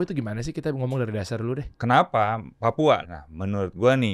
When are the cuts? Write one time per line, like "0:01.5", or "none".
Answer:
0:01.7
0:03.1